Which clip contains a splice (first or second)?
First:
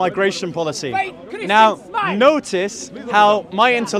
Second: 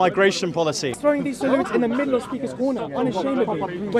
second